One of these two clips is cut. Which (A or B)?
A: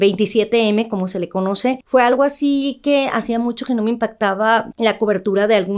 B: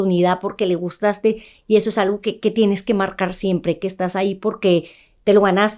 A